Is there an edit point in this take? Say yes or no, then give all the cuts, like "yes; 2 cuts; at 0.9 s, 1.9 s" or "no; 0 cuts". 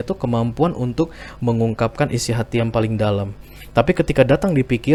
no; 0 cuts